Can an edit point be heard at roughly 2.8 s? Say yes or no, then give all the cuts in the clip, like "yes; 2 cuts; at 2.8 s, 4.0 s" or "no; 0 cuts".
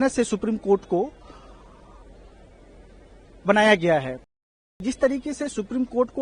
no; 1 cut; at 4.3 s